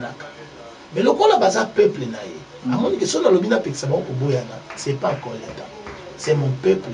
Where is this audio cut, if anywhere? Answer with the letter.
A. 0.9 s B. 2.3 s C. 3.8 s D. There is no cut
D